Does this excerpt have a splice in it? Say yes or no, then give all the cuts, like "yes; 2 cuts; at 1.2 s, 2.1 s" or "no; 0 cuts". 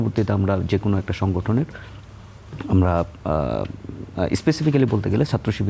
no; 0 cuts